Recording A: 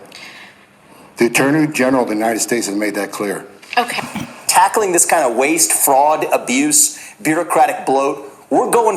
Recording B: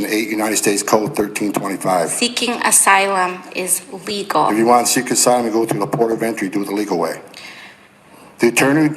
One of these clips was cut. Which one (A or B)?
A